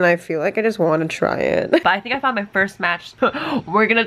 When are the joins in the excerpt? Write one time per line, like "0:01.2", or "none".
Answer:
0:01.8